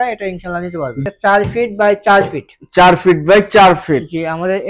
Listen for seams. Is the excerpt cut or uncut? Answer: cut